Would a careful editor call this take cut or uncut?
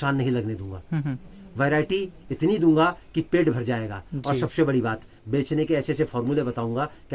uncut